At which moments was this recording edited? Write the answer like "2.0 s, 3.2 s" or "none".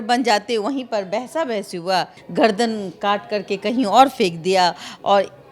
2.2 s